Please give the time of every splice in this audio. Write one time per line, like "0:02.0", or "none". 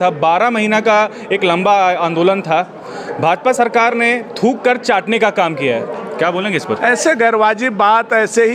none